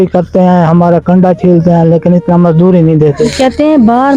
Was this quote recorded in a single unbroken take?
yes; 0 cuts

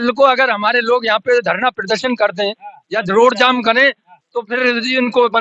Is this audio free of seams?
yes; 0 cuts

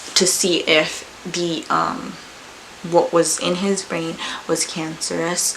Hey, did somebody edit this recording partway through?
no; 0 cuts

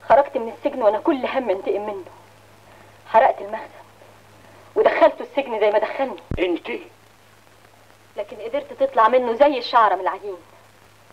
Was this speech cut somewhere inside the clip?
no; 0 cuts

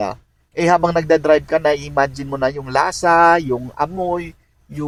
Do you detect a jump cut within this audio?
no; 0 cuts

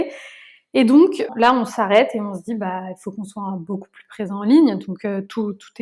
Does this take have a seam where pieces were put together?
yes; 1 cut; at 1.3 s

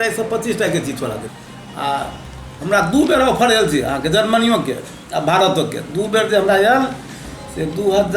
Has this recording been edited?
yes; 1 cut; at 1.3 s

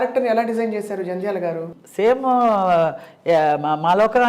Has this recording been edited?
yes; 1 cut; at 1.7 s

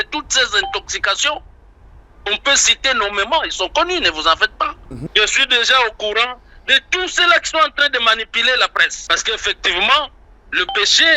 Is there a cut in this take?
yes; 2 cuts; at 4.9 s, 9.0 s

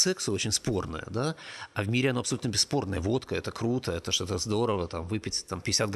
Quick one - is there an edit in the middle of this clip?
no; 0 cuts

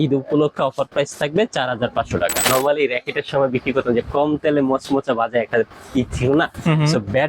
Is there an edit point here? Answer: yes; 1 cut; at 2.4 s

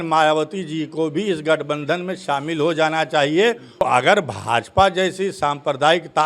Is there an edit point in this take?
yes; 1 cut; at 3.8 s

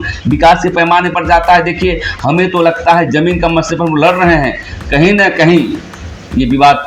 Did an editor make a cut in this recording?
no; 0 cuts

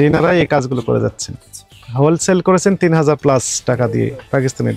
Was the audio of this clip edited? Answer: no; 0 cuts

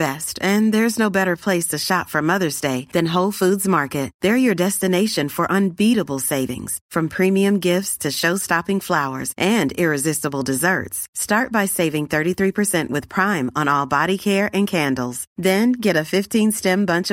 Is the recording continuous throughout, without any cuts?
yes; 0 cuts

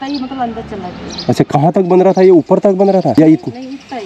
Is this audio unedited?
no; 1 cut; at 3.1 s

